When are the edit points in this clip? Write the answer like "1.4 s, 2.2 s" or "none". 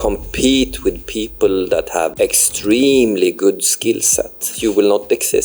2.1 s, 4.5 s